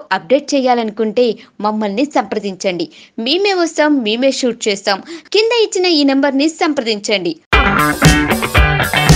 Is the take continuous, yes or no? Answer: yes